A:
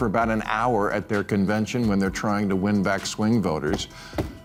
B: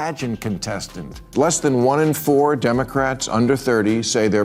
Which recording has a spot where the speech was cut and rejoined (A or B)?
B